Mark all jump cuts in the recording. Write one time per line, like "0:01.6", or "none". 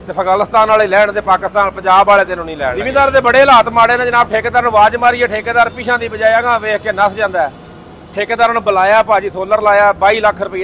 0:02.8

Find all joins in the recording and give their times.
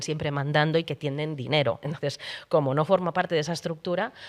none

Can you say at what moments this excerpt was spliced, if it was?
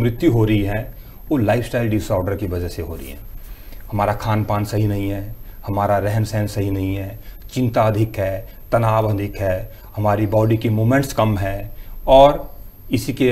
none

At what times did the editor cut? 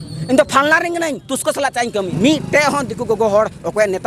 0:02.1

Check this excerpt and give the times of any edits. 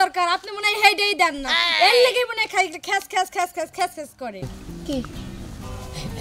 0:04.5

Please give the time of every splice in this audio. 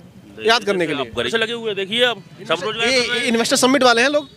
0:01.3

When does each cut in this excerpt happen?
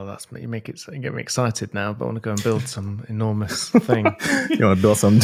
none

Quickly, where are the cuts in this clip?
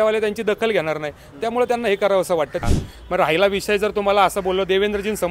0:02.6

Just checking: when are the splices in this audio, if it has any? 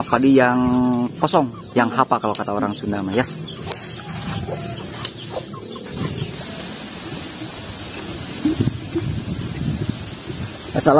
0:06.3

